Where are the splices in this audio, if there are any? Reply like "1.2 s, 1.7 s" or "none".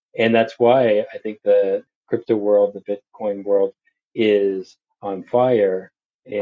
none